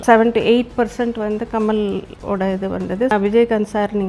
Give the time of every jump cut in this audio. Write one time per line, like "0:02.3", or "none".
0:02.1
0:03.1